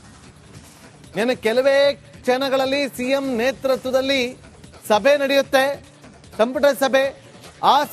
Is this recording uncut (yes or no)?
no